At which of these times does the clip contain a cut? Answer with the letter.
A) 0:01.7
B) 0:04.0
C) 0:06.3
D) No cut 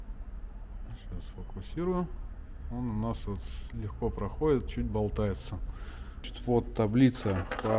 C